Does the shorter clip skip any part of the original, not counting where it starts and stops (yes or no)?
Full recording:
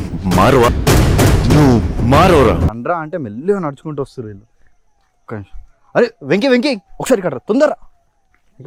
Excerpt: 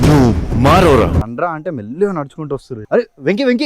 yes